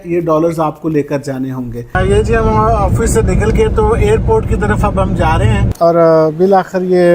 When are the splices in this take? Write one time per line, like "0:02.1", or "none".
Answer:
0:01.9
0:05.7